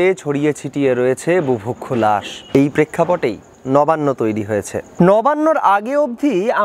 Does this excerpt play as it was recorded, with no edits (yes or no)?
no